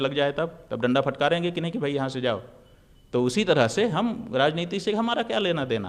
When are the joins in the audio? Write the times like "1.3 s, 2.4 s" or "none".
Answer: none